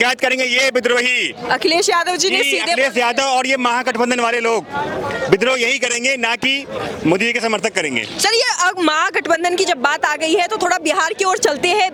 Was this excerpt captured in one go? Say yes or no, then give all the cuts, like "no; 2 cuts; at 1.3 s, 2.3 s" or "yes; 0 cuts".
yes; 0 cuts